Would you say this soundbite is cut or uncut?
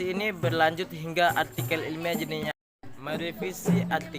cut